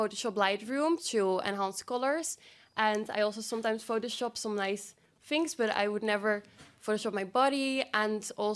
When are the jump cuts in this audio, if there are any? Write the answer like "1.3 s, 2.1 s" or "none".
none